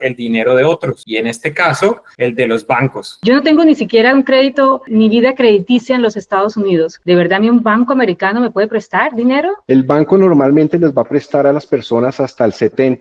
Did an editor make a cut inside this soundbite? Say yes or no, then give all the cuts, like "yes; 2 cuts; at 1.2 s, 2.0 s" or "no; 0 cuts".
yes; 4 cuts; at 1.0 s, 2.1 s, 3.2 s, 9.6 s